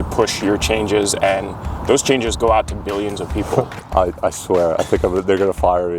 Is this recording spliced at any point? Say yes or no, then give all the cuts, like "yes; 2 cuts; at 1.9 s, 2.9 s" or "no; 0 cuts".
yes; 1 cut; at 3.8 s